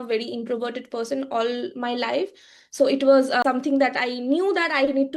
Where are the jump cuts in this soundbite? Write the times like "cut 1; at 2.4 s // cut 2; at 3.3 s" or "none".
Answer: cut 1; at 3.4 s

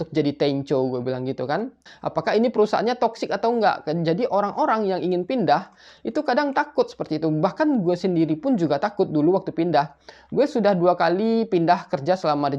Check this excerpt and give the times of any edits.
cut 1; at 1.9 s

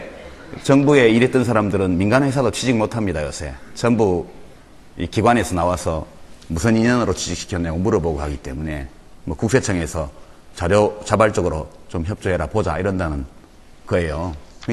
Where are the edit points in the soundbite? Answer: cut 1; at 11.4 s

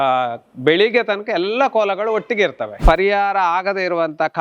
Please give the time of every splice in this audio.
cut 1; at 2.7 s

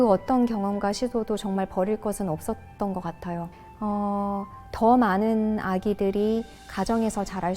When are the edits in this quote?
cut 1; at 3.5 s

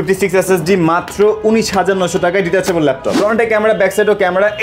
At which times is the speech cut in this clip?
cut 1; at 3.1 s

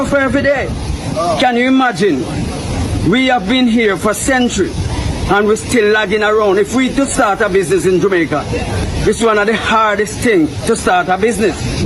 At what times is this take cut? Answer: none

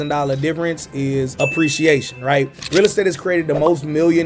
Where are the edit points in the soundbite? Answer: cut 1; at 2.6 s

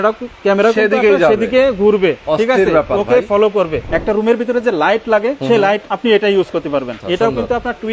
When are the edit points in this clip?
cut 1; at 2.2 s // cut 2; at 3.8 s // cut 3; at 5.6 s // cut 4; at 6.9 s

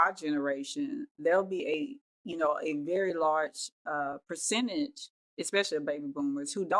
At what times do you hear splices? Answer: none

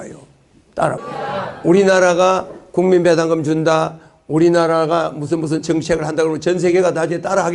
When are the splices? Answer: cut 1; at 1.1 s

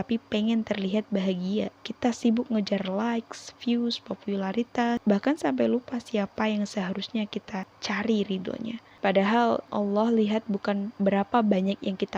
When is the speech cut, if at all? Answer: cut 1; at 1.8 s // cut 2; at 5.0 s // cut 3; at 7.7 s // cut 4; at 8.8 s // cut 5; at 9.7 s // cut 6; at 10.9 s

